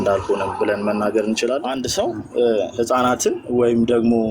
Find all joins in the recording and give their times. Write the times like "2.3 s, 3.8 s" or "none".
1.8 s